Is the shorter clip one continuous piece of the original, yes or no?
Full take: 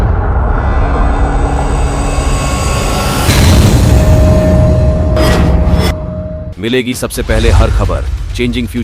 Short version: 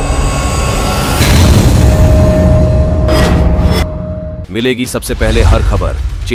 yes